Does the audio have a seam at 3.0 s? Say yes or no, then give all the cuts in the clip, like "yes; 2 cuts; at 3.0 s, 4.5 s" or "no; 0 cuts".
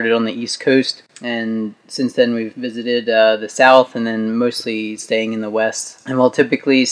no; 2 cuts; at 1.0 s, 5.9 s